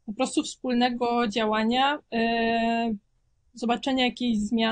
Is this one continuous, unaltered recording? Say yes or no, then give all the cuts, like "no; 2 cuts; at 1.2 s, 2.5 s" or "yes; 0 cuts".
yes; 0 cuts